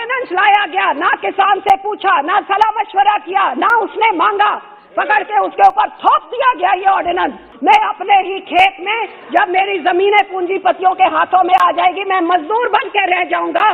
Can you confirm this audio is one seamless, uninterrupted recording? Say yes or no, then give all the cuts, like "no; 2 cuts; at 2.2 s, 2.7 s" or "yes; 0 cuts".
no; 1 cut; at 7.4 s